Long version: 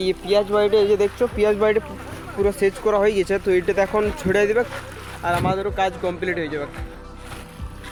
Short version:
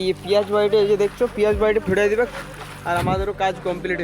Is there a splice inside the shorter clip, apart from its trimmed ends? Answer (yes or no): yes